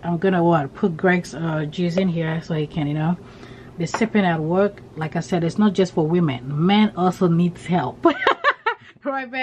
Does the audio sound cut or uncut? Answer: uncut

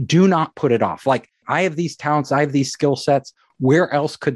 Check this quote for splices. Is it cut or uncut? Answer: cut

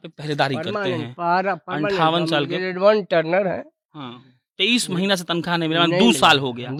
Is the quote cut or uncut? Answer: uncut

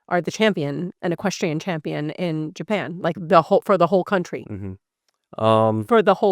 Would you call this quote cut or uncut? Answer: cut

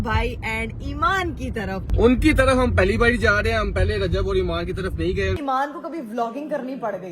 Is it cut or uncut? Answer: cut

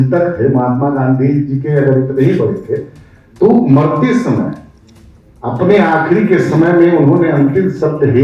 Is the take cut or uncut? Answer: uncut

